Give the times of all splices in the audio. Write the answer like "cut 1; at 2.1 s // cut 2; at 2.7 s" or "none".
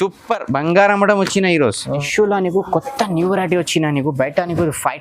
cut 1; at 2.1 s